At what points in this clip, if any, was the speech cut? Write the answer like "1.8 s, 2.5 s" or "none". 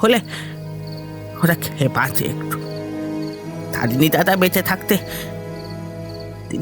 2.3 s, 3.8 s